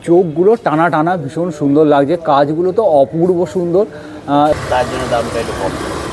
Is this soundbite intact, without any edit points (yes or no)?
no